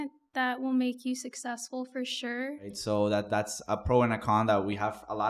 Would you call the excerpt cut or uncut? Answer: cut